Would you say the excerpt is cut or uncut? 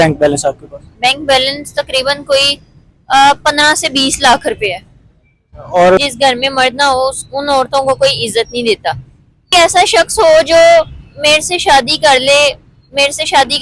cut